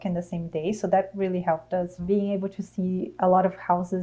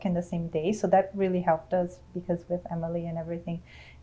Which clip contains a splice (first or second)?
first